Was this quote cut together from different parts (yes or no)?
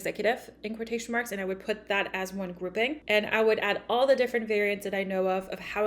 yes